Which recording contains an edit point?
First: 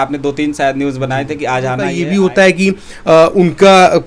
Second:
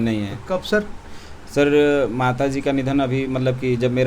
first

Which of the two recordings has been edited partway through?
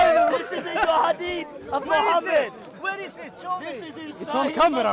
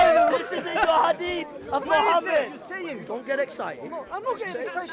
second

